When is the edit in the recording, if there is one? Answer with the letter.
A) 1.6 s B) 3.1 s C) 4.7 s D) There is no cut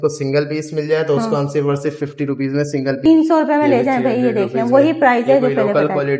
B